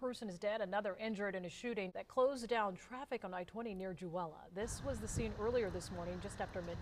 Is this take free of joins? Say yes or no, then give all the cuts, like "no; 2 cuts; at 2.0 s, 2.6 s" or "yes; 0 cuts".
no; 2 cuts; at 2.0 s, 4.4 s